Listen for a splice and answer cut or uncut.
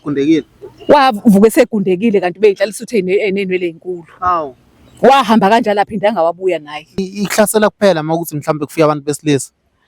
cut